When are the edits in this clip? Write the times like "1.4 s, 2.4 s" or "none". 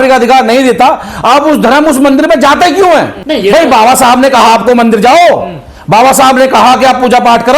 3.2 s